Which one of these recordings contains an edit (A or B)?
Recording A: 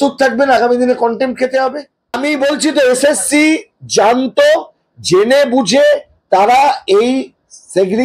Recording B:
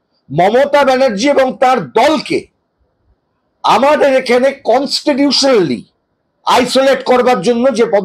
A